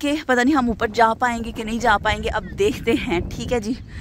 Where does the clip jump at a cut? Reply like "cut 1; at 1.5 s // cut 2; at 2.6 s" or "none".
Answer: none